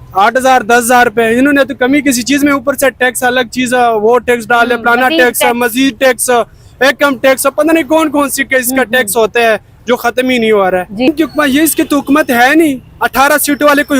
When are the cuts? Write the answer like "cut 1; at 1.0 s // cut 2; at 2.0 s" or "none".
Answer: cut 1; at 11.1 s

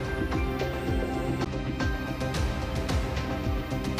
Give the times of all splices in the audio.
none

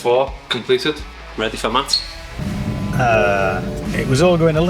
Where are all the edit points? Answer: cut 1; at 0.8 s // cut 2; at 2.2 s

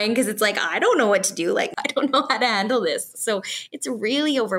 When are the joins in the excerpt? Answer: cut 1; at 1.7 s

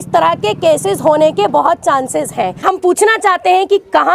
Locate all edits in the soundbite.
cut 1; at 2.6 s

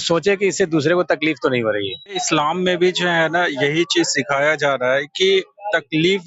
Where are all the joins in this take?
cut 1; at 2.2 s

